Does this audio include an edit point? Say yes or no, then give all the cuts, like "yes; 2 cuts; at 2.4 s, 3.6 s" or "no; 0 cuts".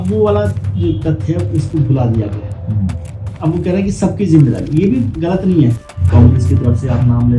yes; 1 cut; at 5.8 s